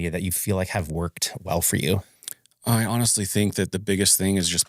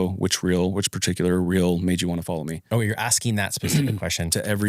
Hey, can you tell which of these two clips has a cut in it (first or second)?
second